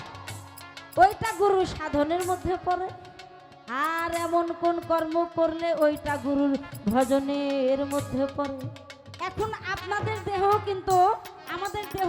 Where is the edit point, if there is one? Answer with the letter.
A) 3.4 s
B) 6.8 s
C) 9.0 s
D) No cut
C